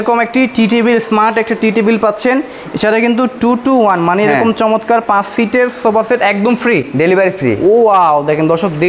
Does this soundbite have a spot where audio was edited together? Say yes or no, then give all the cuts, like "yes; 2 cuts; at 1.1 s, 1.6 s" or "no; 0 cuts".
yes; 1 cut; at 6.8 s